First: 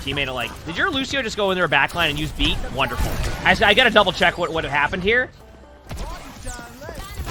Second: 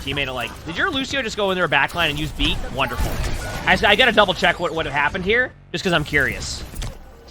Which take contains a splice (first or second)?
first